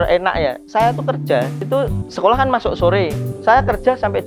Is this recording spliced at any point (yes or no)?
yes